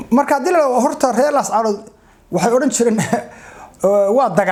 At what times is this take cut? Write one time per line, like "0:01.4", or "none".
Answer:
none